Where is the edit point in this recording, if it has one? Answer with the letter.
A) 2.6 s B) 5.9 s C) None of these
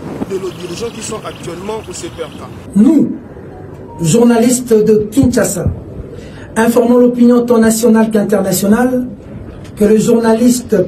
A